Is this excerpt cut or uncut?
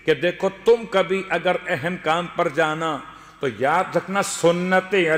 uncut